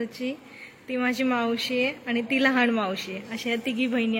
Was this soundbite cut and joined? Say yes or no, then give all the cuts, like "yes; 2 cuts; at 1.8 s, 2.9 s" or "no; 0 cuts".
no; 0 cuts